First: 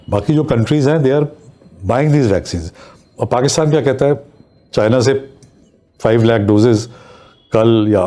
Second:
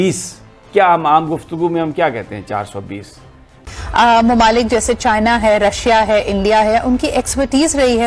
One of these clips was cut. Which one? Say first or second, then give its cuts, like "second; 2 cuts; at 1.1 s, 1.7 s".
second; 1 cut; at 3.8 s